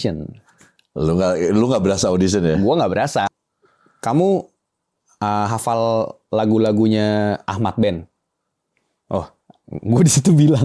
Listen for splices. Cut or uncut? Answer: cut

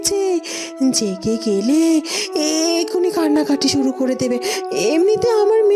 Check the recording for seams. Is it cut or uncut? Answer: uncut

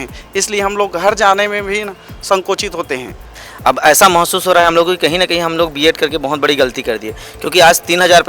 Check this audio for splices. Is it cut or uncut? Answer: cut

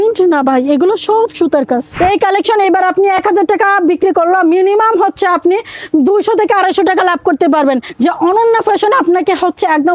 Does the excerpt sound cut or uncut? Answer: cut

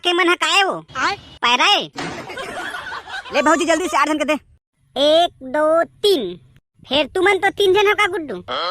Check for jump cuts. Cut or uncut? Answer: cut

